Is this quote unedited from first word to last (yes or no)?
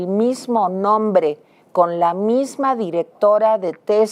yes